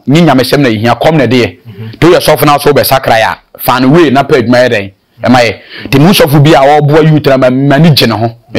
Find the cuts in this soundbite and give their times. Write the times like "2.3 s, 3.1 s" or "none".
none

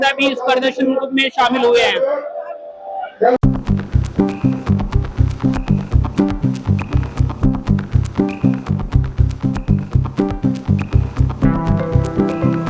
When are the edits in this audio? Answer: 3.4 s

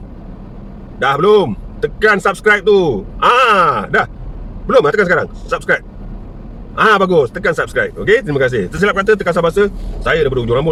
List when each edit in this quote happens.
none

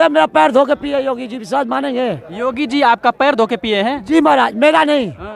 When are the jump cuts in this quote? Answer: none

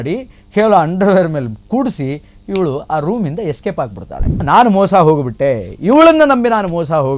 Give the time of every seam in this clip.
4.4 s

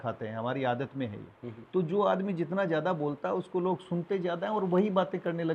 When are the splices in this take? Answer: none

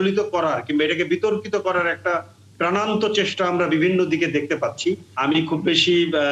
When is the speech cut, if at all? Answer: 5.1 s

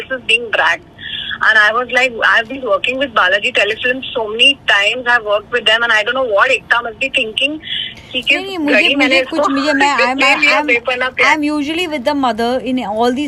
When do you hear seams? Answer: none

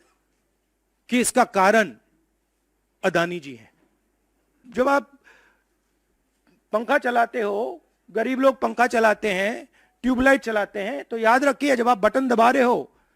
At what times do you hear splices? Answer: 4.6 s

